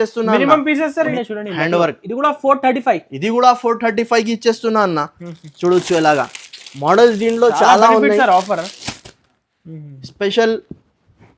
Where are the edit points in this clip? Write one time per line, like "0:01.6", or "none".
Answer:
0:01.1